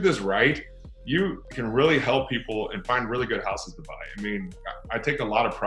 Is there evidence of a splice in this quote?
no; 0 cuts

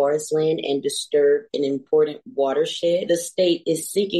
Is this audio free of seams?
no; 1 cut; at 3.0 s

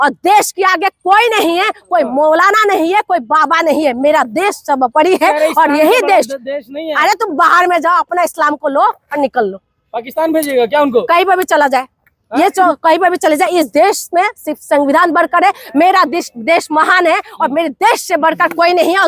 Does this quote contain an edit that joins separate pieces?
no; 0 cuts

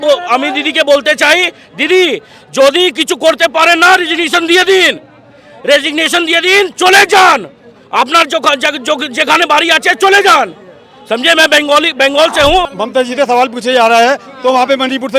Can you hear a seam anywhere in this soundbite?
yes; 1 cut; at 12.7 s

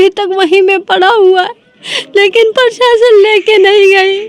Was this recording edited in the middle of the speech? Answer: no; 0 cuts

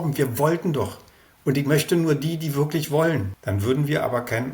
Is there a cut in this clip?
yes; 1 cut; at 3.3 s

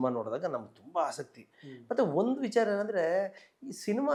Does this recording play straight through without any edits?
yes; 0 cuts

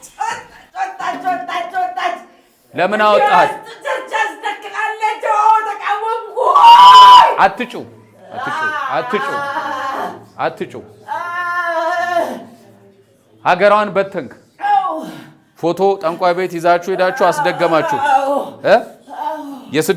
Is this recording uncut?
yes; 0 cuts

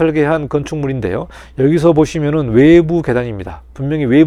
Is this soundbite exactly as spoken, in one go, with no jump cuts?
yes; 0 cuts

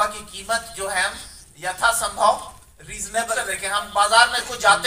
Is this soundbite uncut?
no; 1 cut; at 3.4 s

